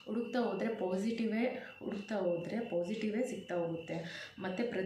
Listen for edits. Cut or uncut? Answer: uncut